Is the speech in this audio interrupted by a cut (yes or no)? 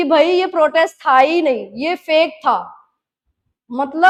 no